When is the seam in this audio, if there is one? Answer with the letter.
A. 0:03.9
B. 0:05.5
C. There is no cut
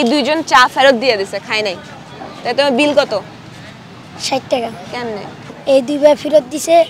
B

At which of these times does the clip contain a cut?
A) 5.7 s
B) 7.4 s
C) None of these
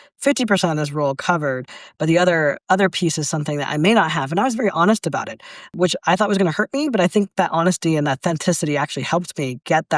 A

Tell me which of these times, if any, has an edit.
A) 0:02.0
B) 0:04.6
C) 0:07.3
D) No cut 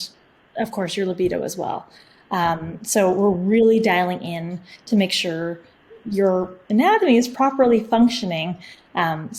C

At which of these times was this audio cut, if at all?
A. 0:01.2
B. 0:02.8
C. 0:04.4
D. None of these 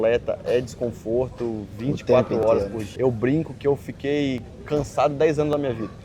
B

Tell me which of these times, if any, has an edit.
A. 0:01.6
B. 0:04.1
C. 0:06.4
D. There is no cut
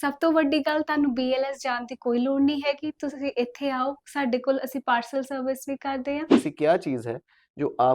C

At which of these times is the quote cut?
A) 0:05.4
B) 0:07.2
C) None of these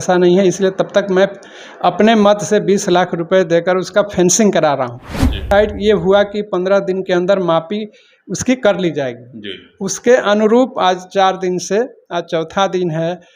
A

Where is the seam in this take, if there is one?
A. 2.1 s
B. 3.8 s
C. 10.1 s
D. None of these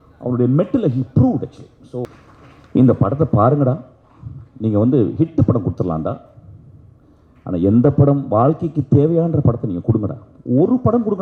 A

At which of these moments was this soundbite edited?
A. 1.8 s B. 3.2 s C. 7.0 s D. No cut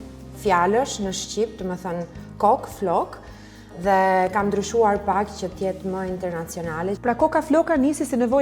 C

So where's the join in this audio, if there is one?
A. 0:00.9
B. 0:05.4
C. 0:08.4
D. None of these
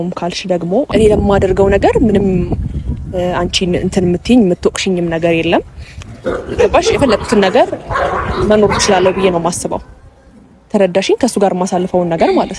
A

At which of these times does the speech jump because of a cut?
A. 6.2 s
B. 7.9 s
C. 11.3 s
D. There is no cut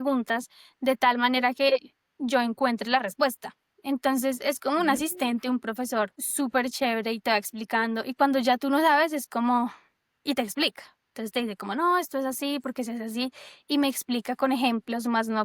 A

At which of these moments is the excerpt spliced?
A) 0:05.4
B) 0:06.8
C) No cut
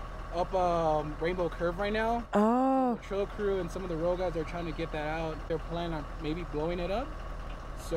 A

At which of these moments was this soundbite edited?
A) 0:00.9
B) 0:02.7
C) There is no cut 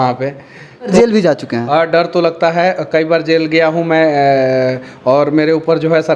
A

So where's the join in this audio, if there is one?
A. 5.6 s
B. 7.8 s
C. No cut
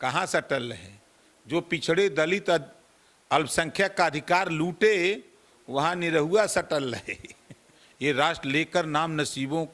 B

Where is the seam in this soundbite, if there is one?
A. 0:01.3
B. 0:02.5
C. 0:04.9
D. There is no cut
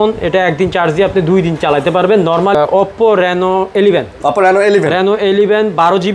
B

